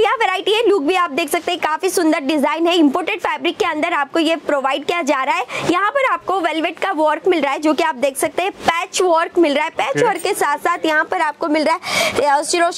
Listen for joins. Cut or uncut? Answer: uncut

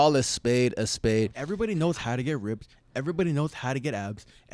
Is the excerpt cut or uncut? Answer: cut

